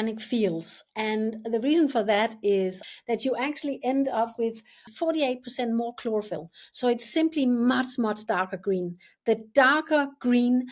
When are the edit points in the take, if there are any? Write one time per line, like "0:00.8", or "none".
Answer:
0:02.9
0:04.9